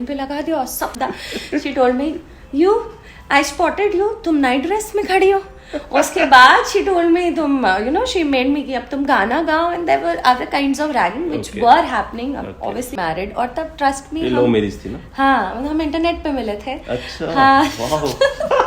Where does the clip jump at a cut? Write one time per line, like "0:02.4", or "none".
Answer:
0:00.9
0:12.9

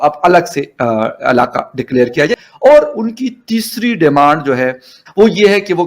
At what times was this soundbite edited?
0:02.4
0:05.0

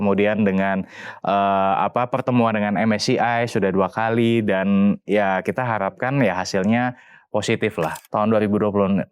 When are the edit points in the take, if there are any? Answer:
0:08.0

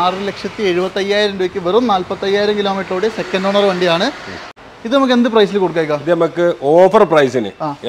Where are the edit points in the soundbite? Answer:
0:04.5

